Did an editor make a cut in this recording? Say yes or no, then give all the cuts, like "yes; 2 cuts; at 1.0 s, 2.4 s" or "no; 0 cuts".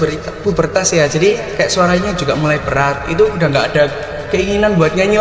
no; 0 cuts